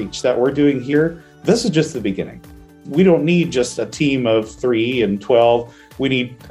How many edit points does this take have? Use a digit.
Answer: 3